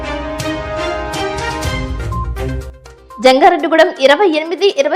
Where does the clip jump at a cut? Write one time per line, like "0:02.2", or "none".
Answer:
0:02.7